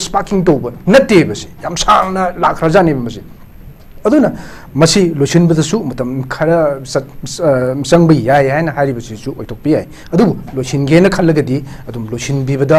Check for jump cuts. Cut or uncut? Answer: uncut